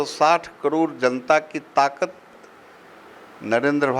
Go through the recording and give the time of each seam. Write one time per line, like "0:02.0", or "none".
none

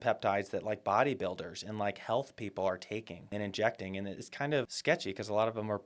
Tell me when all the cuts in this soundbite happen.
0:03.3
0:04.7

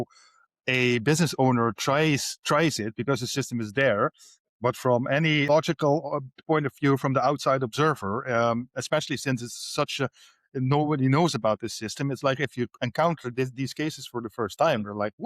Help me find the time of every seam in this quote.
0:05.5

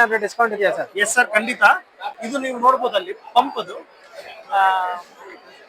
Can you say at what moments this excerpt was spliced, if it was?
0:02.2

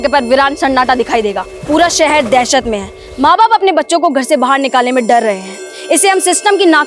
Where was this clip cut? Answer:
0:01.5

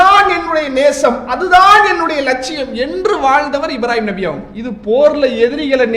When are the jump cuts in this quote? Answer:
0:04.5

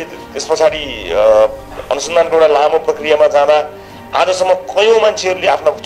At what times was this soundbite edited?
none

